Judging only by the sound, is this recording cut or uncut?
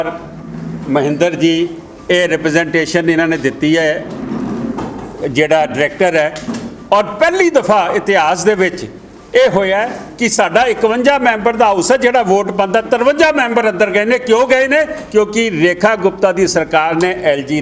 uncut